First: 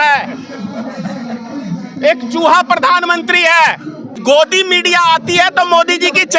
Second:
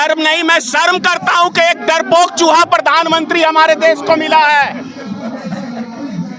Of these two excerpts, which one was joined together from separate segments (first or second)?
first